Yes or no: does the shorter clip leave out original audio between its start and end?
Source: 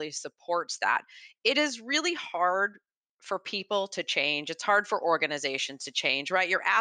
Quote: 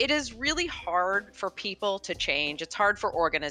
yes